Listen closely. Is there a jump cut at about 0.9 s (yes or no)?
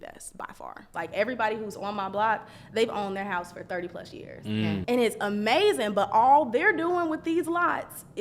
yes